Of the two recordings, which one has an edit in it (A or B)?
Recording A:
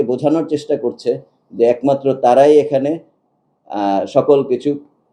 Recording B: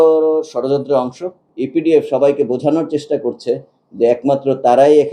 B